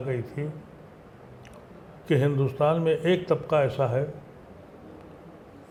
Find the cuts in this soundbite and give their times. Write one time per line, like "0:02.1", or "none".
none